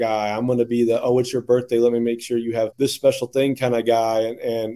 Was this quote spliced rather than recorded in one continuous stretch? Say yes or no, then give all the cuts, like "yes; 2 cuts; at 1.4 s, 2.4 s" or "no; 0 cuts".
yes; 1 cut; at 2.7 s